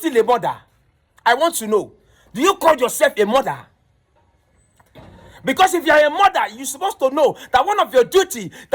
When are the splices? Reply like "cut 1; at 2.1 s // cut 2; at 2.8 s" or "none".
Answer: none